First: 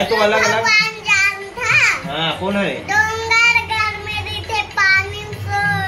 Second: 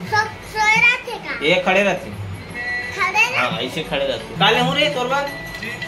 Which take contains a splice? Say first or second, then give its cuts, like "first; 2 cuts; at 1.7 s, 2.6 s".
second; 1 cut; at 4.3 s